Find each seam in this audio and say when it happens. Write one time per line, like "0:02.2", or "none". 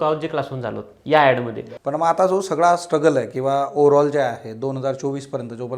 0:01.6